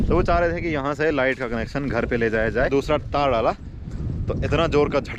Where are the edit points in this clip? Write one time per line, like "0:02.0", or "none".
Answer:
0:02.7